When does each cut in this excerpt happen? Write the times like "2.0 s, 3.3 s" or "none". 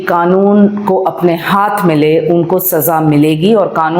none